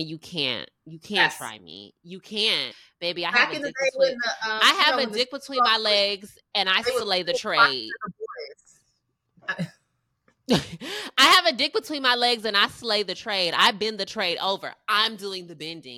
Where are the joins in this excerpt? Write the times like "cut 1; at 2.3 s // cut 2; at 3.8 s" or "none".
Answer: cut 1; at 2.8 s

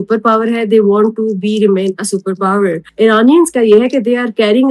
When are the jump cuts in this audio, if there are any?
cut 1; at 2.8 s

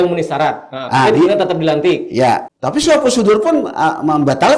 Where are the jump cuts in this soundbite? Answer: cut 1; at 2.5 s

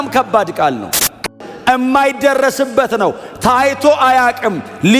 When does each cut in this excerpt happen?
cut 1; at 1.2 s

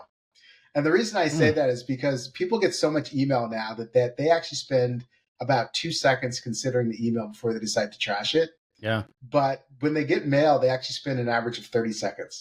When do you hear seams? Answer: none

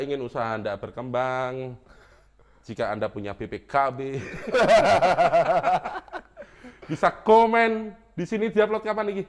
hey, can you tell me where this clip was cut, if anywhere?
none

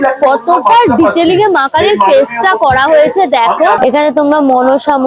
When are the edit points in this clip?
cut 1; at 3.8 s

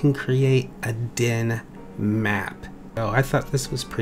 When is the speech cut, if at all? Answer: cut 1; at 3.0 s

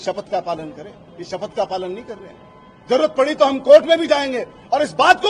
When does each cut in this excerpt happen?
none

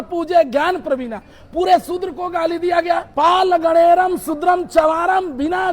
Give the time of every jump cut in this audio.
cut 1; at 3.1 s

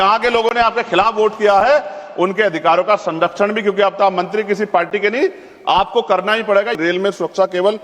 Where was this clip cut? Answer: cut 1; at 6.8 s

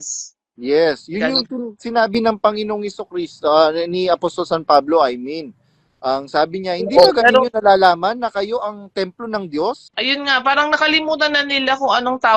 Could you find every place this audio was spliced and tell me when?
cut 1; at 9.9 s

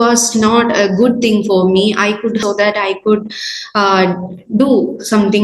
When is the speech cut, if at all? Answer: cut 1; at 2.4 s

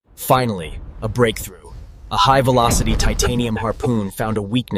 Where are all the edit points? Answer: none

